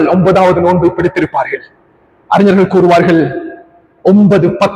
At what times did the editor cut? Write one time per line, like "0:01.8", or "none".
none